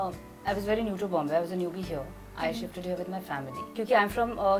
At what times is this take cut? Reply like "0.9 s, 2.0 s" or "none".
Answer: 3.6 s